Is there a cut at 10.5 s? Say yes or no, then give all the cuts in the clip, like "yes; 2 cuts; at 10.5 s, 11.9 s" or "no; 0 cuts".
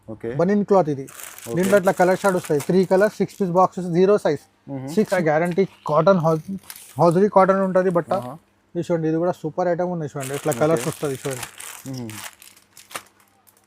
no; 1 cut; at 5.1 s